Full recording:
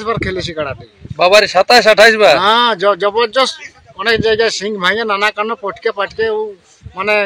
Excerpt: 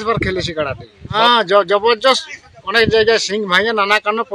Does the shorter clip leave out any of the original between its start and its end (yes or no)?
yes